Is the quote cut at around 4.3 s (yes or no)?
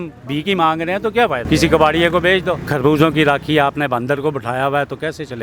no